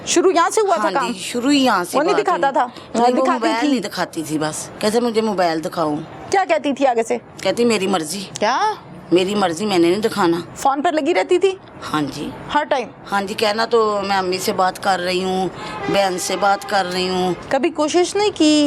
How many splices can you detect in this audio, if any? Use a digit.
4